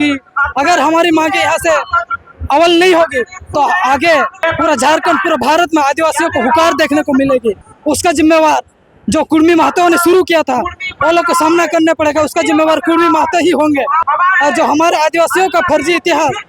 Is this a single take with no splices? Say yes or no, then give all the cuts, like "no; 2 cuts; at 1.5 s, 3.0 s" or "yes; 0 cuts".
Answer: no; 3 cuts; at 4.4 s, 7.7 s, 14.0 s